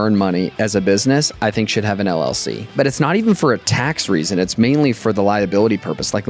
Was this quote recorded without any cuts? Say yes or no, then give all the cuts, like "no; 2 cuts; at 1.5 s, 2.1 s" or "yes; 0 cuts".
no; 1 cut; at 2.7 s